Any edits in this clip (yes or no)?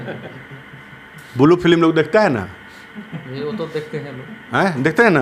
no